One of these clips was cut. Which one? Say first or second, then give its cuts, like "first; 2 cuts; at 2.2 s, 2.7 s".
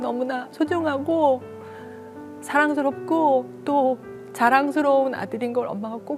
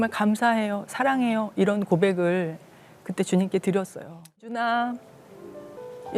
second; 1 cut; at 4.4 s